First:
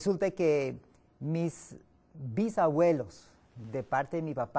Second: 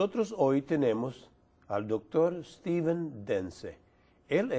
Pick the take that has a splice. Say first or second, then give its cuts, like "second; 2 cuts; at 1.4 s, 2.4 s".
first; 1 cut; at 1.6 s